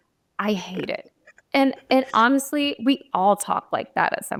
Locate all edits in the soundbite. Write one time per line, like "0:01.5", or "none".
none